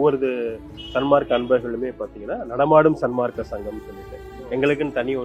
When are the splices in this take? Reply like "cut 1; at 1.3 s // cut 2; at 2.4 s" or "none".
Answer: none